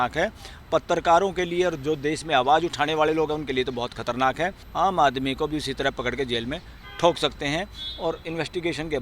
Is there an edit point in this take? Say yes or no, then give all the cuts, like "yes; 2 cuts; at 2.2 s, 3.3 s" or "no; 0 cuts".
yes; 1 cut; at 4.6 s